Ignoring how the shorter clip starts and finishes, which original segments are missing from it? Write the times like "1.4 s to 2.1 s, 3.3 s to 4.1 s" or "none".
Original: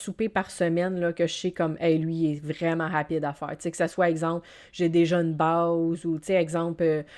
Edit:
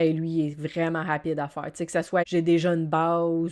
4.1 s to 4.7 s